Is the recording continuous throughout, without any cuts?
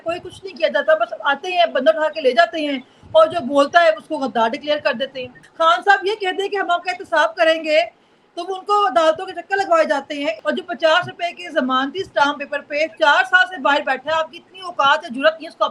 no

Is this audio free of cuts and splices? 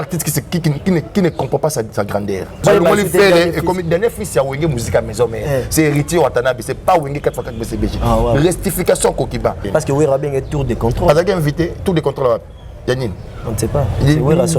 no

